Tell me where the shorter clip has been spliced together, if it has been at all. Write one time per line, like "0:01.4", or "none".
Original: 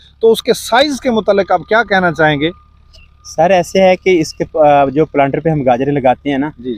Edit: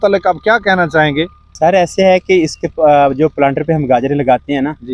0:01.4

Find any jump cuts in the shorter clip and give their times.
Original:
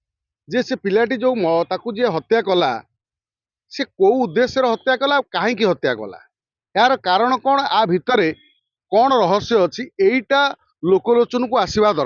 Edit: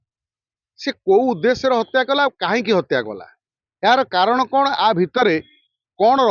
none

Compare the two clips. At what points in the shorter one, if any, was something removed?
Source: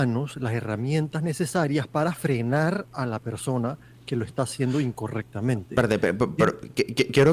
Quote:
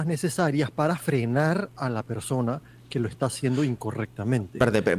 none

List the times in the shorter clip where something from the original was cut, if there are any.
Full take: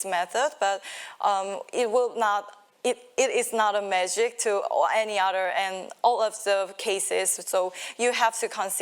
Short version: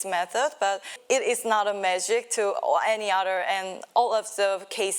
0:01.0

